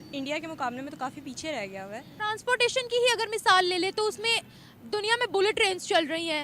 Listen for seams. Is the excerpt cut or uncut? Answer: cut